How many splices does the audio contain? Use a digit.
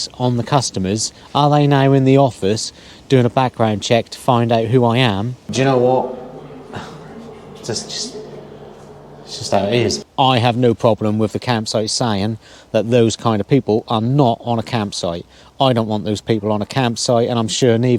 2